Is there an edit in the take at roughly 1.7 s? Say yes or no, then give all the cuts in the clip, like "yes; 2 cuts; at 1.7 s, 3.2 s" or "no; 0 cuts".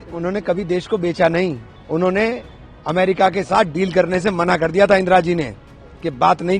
yes; 1 cut; at 1.7 s